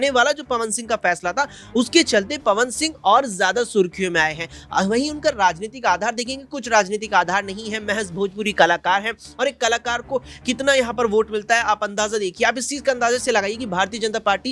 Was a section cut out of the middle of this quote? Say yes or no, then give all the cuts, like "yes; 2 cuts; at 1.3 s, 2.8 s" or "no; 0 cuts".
no; 0 cuts